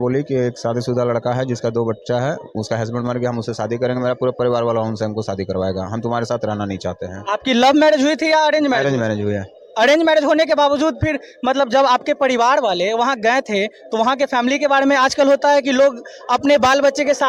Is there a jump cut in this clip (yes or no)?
no